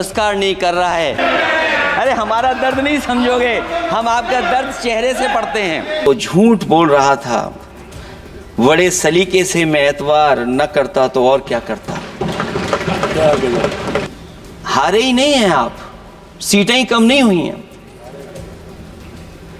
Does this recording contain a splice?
yes; 3 cuts; at 1.2 s, 6.1 s, 14.1 s

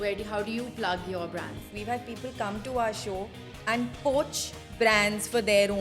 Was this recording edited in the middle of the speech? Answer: yes; 1 cut; at 1.7 s

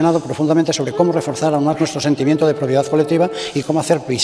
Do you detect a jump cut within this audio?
no; 0 cuts

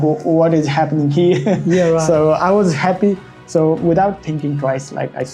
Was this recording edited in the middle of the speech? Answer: no; 0 cuts

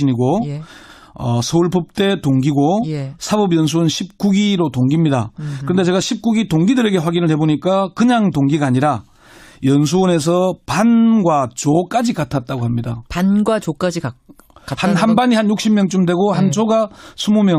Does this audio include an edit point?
yes; 1 cut; at 1.1 s

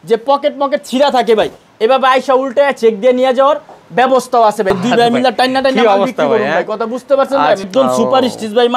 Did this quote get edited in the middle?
yes; 2 cuts; at 4.8 s, 7.7 s

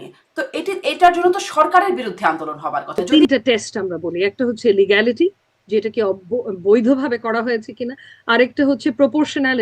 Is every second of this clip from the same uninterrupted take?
no; 1 cut; at 3.0 s

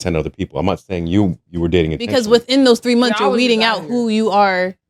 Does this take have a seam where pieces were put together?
no; 0 cuts

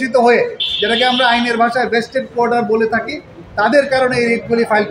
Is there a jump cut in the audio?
no; 0 cuts

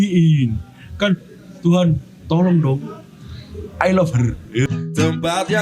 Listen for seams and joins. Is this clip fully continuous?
no; 1 cut; at 4.7 s

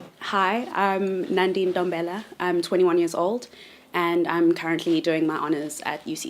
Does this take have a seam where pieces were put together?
yes; 1 cut; at 2.9 s

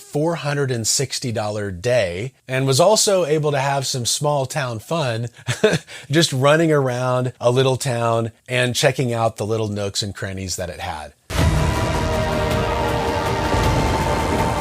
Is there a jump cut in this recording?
yes; 1 cut; at 11.2 s

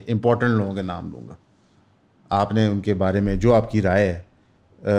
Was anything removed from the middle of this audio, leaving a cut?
no; 0 cuts

